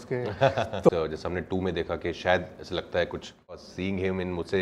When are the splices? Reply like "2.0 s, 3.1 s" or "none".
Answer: 0.9 s, 3.7 s